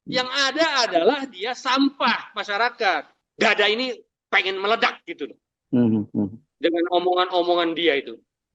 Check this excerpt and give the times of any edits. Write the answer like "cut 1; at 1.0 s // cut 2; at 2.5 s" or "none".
cut 1; at 3.1 s